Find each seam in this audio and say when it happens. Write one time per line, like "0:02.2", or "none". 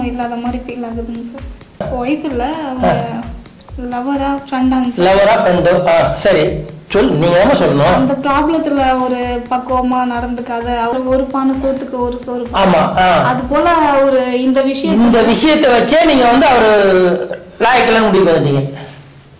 0:01.9
0:10.9